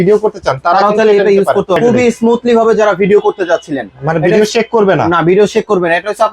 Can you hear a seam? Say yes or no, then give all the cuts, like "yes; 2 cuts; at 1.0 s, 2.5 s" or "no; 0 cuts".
yes; 1 cut; at 1.8 s